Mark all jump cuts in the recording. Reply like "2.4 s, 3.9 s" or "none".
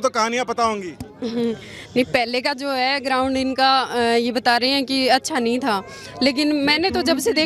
none